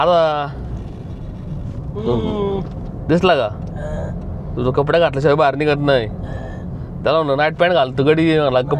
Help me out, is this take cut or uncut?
uncut